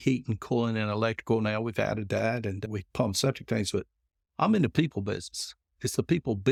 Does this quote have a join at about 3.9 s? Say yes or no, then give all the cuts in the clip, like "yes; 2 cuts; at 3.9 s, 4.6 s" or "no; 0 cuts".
no; 0 cuts